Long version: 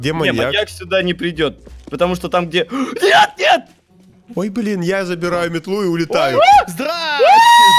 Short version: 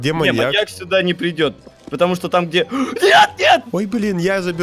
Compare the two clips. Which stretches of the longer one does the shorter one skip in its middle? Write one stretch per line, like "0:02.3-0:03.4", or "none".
0:03.7-0:04.3